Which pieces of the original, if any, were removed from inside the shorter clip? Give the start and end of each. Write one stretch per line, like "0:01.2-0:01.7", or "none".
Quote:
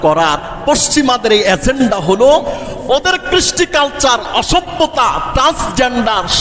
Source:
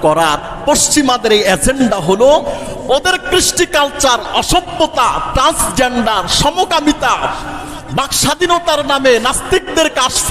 none